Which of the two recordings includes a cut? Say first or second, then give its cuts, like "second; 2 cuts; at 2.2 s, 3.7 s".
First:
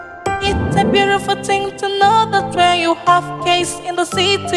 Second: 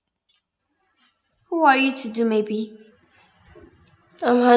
second; 1 cut; at 1.3 s